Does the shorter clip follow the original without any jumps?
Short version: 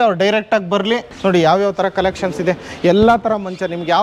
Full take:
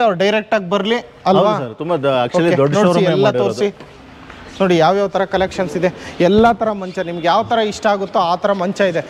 no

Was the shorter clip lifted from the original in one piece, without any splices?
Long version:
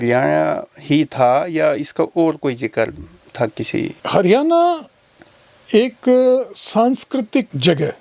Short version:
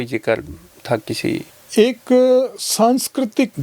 no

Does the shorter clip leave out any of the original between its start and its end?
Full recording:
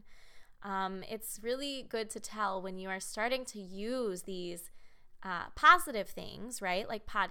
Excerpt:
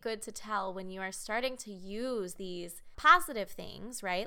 yes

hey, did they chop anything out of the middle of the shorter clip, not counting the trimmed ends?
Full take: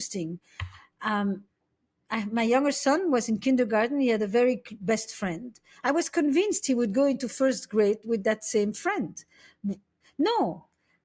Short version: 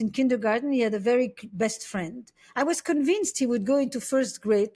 no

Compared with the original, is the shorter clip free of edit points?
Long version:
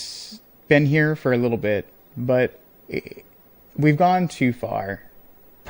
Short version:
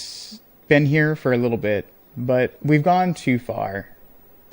no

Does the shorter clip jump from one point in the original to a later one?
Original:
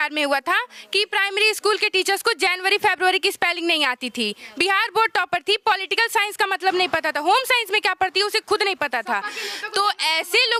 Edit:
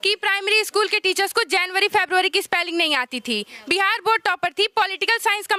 no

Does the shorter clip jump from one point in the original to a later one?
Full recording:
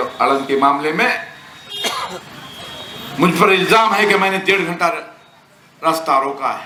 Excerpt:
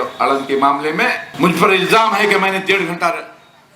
yes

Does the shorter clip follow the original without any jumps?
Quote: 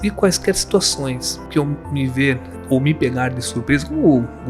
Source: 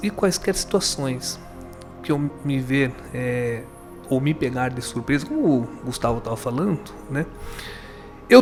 no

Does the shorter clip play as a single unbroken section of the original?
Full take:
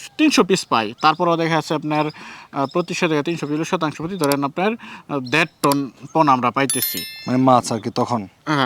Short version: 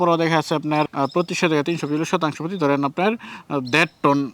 no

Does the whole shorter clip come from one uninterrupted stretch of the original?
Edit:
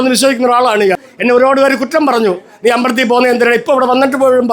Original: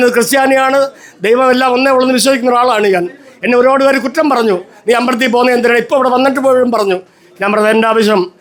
no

